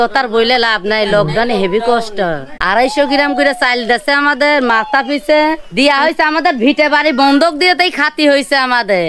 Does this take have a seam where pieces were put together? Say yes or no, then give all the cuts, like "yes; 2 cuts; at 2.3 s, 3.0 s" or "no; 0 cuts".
yes; 2 cuts; at 2.5 s, 5.6 s